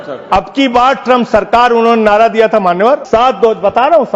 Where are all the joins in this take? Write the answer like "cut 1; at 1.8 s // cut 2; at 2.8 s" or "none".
cut 1; at 3.0 s

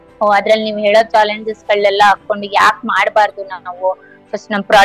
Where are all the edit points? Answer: none

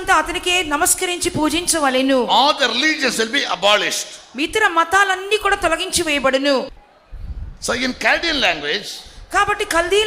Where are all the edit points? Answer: cut 1; at 6.7 s

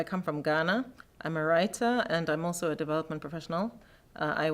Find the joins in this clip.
cut 1; at 1.2 s

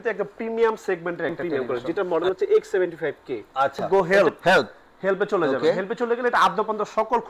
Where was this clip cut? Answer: cut 1; at 1.4 s // cut 2; at 3.8 s

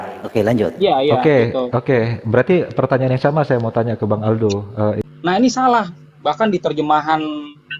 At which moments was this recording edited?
cut 1; at 5.0 s

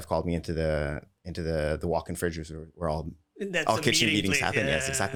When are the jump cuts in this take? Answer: none

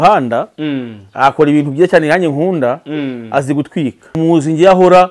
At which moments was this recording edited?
cut 1; at 4.2 s

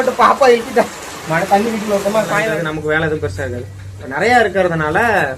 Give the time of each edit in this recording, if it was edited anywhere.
cut 1; at 2.5 s

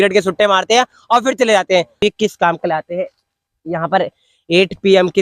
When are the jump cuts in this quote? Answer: cut 1; at 2.0 s

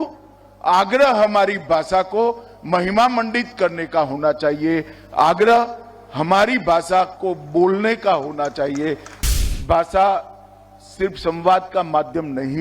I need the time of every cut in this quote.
cut 1; at 9.1 s

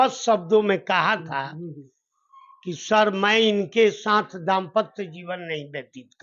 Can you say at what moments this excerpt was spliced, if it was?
none

